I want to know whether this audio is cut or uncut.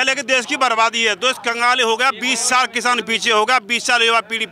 uncut